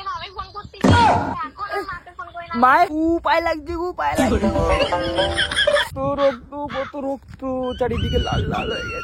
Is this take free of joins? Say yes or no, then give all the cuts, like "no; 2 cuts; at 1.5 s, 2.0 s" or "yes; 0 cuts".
no; 2 cuts; at 2.9 s, 5.9 s